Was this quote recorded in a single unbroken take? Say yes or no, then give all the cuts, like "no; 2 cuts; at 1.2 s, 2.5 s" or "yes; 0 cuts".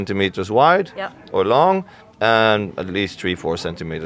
yes; 0 cuts